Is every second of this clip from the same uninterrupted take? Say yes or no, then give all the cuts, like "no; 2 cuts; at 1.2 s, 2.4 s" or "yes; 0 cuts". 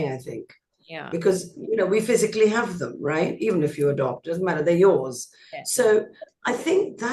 yes; 0 cuts